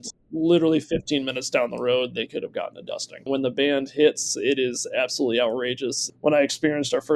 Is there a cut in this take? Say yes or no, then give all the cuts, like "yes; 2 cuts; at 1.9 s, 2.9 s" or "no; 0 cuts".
yes; 2 cuts; at 3.2 s, 6.1 s